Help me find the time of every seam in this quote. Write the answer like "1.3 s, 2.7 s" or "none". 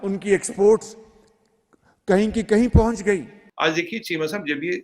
3.4 s